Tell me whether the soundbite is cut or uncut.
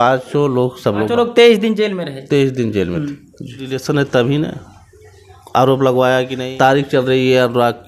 cut